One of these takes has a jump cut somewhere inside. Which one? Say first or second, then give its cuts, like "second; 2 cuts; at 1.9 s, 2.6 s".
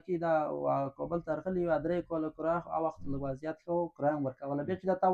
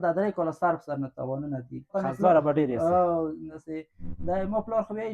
second; 2 cuts; at 1.9 s, 3.5 s